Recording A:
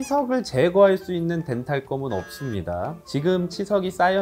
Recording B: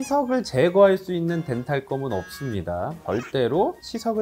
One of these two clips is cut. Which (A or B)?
B